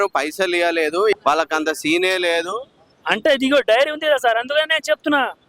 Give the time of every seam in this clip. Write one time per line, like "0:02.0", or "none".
0:01.1